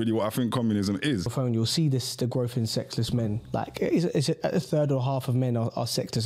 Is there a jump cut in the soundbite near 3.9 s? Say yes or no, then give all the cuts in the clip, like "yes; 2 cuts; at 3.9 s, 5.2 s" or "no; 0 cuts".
no; 1 cut; at 1.3 s